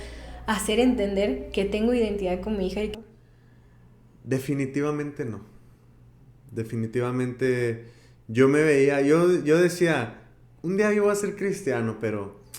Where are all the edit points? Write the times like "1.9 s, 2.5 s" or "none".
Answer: 2.9 s